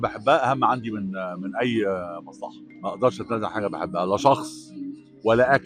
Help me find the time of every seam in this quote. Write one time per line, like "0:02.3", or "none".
0:02.7